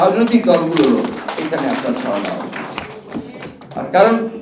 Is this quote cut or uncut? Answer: uncut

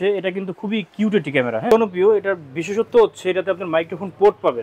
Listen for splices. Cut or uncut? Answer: cut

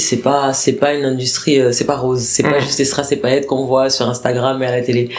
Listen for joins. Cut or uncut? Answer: uncut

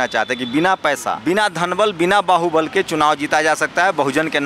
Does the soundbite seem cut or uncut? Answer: cut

